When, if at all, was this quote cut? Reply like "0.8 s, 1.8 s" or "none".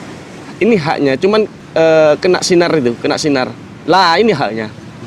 1.6 s